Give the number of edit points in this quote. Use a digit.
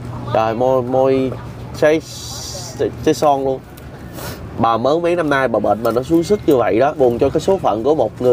1